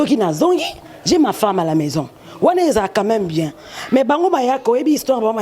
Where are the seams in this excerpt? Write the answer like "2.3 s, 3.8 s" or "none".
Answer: none